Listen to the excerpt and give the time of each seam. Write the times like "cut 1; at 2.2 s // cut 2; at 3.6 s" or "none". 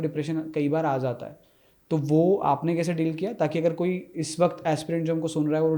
none